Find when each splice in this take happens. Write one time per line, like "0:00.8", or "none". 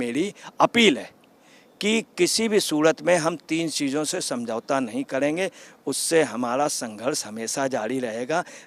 none